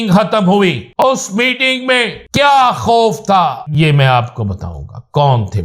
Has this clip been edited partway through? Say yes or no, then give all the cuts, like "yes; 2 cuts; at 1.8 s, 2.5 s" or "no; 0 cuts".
yes; 3 cuts; at 1.0 s, 2.2 s, 3.6 s